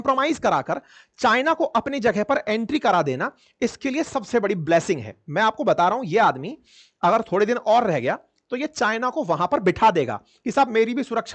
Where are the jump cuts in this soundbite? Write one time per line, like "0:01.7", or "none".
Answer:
none